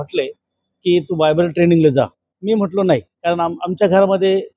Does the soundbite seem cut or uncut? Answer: cut